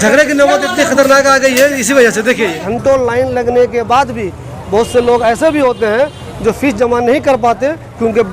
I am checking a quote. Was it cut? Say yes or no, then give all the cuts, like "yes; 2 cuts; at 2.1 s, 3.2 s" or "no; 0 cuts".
yes; 1 cut; at 2.6 s